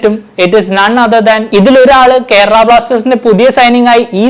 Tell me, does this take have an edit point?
yes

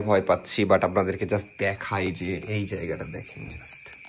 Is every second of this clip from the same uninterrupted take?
yes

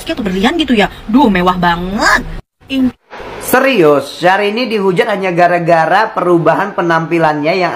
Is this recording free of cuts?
no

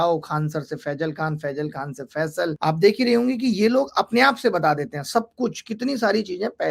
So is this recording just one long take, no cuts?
no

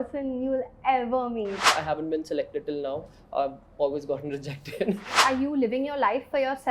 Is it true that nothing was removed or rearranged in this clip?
no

